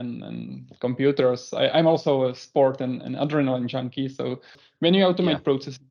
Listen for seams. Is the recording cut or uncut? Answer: cut